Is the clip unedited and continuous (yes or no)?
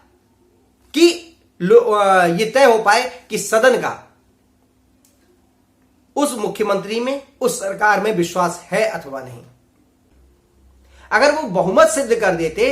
no